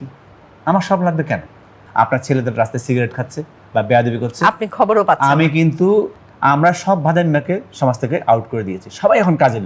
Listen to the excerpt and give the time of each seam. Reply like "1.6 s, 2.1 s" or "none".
1.8 s, 6.1 s